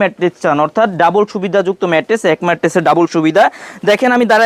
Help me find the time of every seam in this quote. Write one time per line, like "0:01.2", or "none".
none